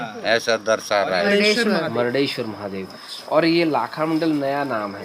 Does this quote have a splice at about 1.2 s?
yes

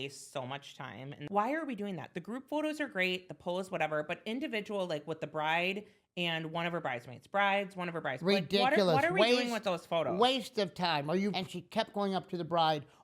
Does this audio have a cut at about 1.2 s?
yes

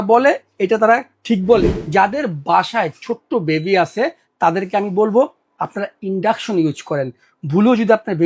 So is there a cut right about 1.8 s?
yes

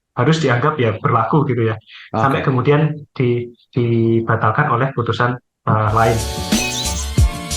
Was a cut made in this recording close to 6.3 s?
yes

